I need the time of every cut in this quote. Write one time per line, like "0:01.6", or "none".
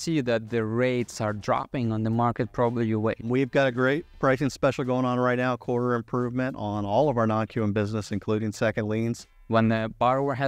0:03.2
0:09.3

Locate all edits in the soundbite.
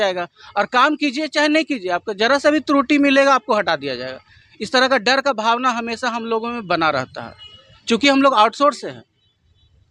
none

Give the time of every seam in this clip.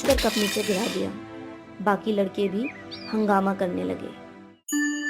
0:04.1

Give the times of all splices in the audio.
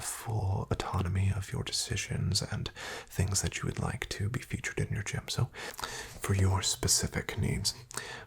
0:05.6

